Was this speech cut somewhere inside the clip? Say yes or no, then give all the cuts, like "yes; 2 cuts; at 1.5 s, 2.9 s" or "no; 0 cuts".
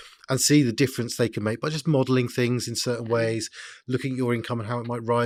no; 0 cuts